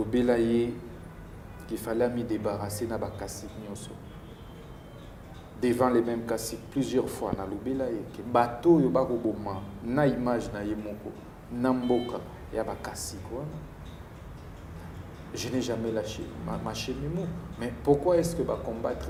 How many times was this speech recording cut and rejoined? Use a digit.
0